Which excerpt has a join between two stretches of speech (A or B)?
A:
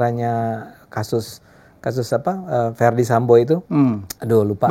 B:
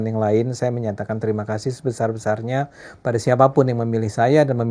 A